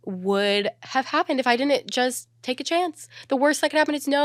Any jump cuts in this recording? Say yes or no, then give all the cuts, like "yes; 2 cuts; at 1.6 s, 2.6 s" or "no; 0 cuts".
no; 0 cuts